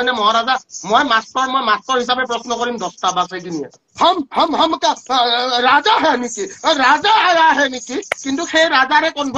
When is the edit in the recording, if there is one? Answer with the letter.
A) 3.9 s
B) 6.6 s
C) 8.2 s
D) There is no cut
A